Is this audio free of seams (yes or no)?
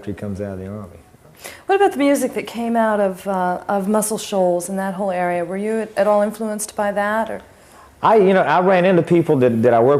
yes